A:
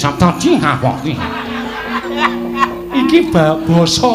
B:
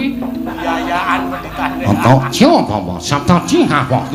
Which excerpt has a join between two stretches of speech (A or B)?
A